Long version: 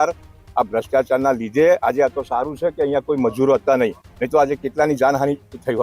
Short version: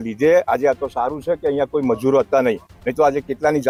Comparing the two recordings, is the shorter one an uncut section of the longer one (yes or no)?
yes